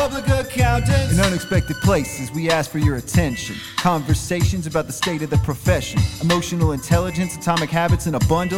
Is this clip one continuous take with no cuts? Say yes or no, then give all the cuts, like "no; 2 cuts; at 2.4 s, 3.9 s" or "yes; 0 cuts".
yes; 0 cuts